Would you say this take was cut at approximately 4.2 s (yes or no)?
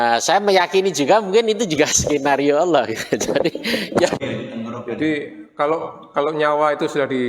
yes